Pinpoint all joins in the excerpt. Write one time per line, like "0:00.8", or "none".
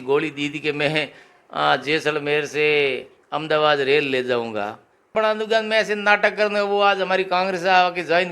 0:05.1